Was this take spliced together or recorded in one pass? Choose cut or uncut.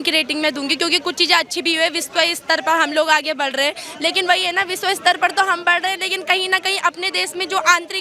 uncut